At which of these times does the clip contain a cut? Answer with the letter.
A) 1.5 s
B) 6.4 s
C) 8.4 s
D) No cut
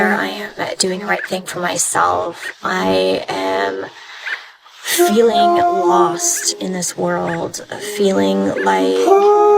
A